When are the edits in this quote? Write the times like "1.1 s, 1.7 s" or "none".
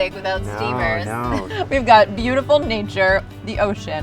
1.5 s